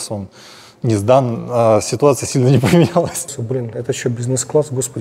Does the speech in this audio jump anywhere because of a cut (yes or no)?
yes